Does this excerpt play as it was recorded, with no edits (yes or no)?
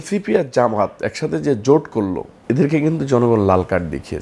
no